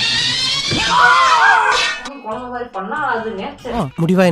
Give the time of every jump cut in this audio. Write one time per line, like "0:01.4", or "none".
0:02.0